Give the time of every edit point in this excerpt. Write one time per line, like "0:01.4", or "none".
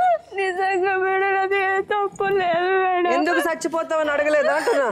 none